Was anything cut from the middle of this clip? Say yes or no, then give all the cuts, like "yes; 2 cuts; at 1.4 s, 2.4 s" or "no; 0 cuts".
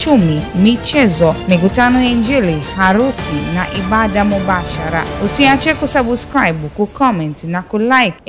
no; 0 cuts